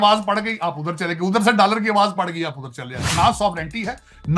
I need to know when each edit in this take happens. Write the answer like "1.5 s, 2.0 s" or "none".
3.0 s